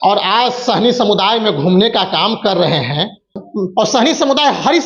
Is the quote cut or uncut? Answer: cut